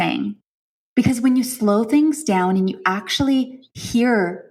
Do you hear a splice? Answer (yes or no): no